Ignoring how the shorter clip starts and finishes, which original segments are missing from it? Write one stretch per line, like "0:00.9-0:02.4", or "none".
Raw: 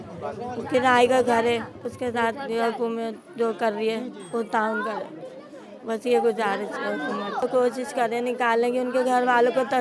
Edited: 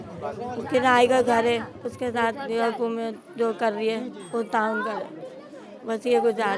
none